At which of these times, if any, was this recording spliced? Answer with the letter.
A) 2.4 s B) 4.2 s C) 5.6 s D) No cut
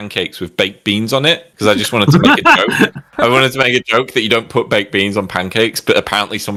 D